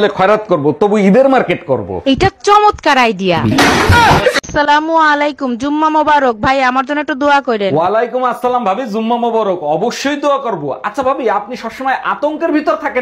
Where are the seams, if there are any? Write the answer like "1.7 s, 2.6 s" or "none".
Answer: 4.4 s